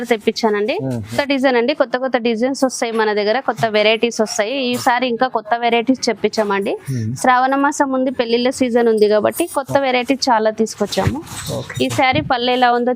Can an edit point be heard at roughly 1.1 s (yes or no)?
yes